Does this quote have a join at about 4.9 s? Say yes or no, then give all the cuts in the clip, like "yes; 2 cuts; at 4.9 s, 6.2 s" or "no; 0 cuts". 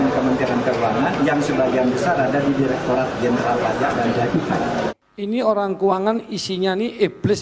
yes; 1 cut; at 4.9 s